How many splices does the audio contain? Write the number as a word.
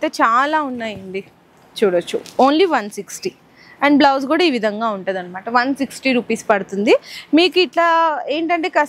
zero